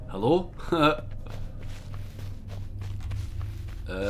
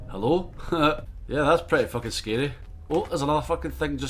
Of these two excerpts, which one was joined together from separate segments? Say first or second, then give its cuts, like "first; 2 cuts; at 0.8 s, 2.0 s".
second; 2 cuts; at 1.1 s, 2.7 s